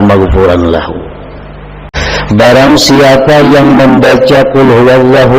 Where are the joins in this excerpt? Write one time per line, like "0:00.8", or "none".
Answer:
0:01.9